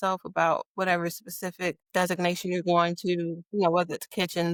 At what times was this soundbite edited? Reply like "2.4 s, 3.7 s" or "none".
none